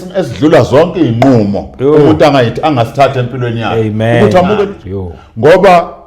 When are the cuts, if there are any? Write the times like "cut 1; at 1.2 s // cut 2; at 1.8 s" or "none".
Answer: cut 1; at 4.8 s

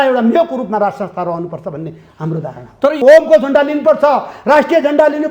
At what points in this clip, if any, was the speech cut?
cut 1; at 3.0 s

